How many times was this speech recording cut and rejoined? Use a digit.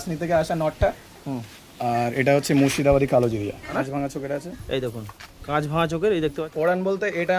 2